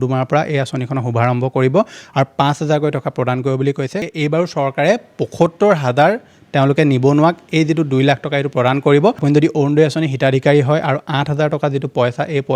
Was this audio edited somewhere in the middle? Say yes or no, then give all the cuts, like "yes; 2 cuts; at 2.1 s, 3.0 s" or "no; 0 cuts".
yes; 2 cuts; at 4.0 s, 9.2 s